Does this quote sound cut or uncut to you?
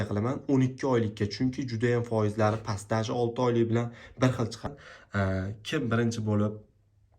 cut